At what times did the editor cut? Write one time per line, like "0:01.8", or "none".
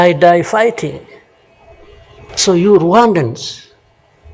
0:02.3